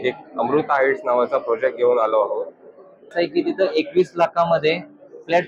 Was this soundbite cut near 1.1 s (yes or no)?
no